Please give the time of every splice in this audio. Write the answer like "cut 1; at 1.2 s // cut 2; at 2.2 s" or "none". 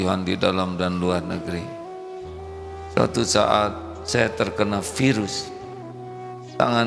cut 1; at 1.6 s // cut 2; at 3.0 s